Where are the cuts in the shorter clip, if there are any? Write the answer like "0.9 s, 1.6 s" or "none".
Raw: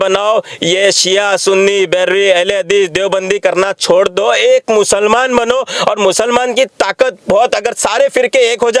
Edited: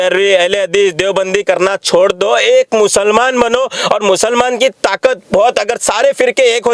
none